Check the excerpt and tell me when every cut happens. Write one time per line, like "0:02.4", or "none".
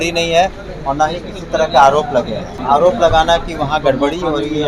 0:02.5